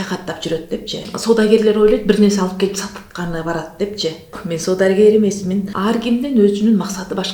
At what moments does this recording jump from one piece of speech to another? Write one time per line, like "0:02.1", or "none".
0:01.1
0:04.4
0:05.7

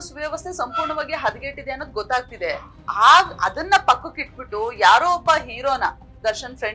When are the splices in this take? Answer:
none

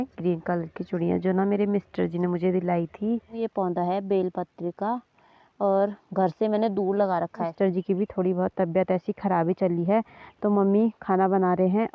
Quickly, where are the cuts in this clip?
0:03.4
0:07.5

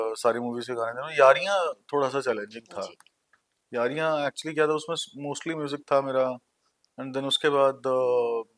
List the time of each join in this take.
none

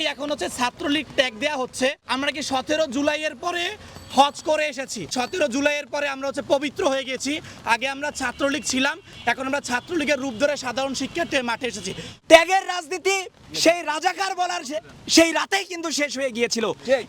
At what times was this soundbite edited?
0:02.0
0:05.1
0:12.1

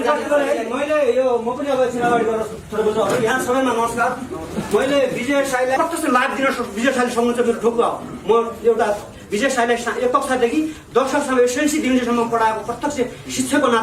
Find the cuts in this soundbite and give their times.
0:05.8

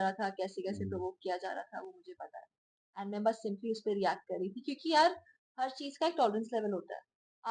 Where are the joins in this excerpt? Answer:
none

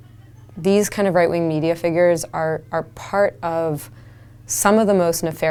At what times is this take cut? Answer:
none

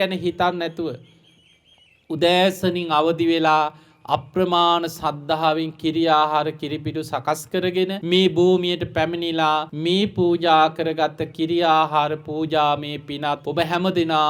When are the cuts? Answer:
0:08.0
0:09.7
0:13.4

